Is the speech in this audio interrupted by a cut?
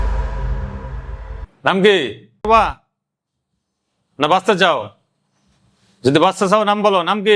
yes; 1 cut; at 2.5 s

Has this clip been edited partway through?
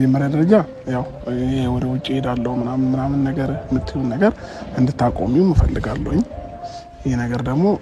no; 0 cuts

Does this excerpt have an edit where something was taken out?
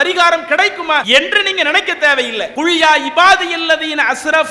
yes; 2 cuts; at 1.1 s, 2.5 s

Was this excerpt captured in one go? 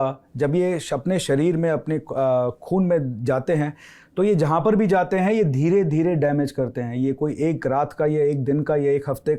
yes; 0 cuts

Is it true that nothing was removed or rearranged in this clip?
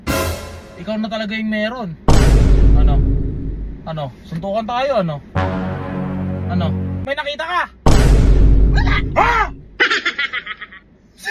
no; 1 cut; at 7.0 s

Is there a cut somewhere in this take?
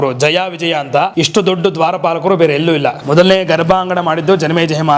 yes; 2 cuts; at 1.1 s, 3.0 s

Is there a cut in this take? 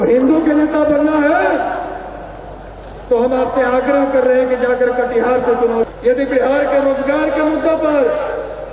yes; 1 cut; at 5.9 s

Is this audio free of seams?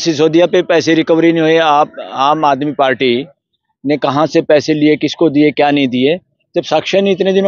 yes; 0 cuts

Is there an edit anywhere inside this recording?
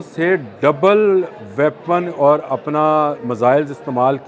no; 0 cuts

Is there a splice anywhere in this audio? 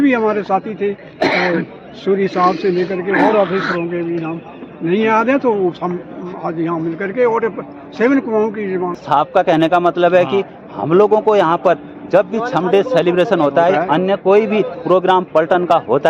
no; 0 cuts

